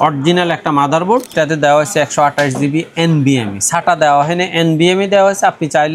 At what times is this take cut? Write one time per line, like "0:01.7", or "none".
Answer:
0:01.3